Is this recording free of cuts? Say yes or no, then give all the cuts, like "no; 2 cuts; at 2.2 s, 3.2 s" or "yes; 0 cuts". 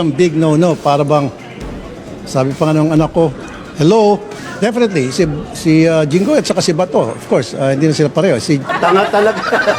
no; 2 cuts; at 4.4 s, 8.6 s